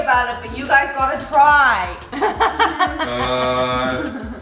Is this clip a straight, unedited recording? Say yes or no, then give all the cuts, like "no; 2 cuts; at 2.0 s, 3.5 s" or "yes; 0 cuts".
yes; 0 cuts